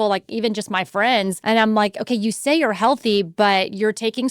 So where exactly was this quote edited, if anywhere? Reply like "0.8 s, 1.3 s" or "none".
1.4 s